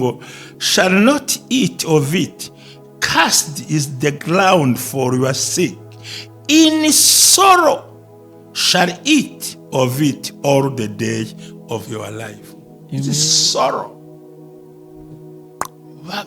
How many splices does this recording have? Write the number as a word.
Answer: zero